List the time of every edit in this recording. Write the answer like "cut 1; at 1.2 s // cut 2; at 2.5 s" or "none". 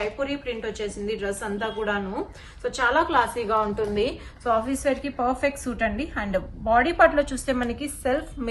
none